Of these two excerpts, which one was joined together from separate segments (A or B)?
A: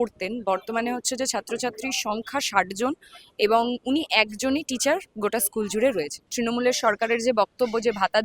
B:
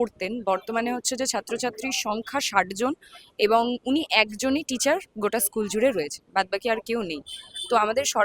A